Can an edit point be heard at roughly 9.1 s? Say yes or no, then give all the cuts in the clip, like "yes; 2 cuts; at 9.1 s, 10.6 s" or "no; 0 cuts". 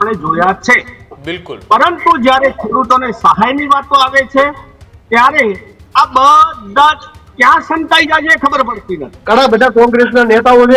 yes; 1 cut; at 9.1 s